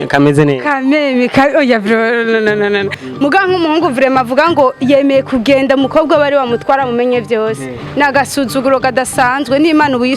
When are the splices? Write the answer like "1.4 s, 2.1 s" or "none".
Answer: 3.0 s

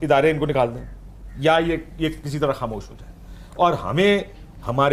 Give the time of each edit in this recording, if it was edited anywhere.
none

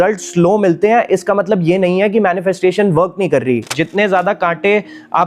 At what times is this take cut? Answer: 3.7 s

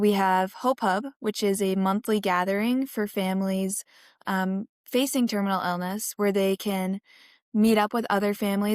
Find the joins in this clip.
none

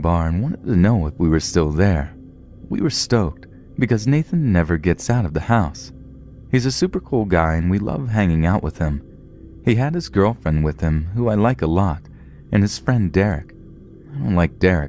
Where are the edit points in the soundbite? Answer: none

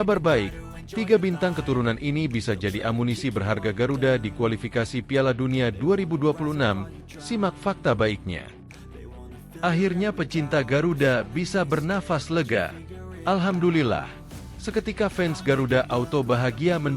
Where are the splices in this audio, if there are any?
8.9 s

